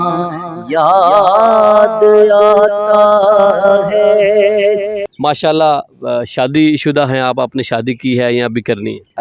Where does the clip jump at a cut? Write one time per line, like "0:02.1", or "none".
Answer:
0:05.1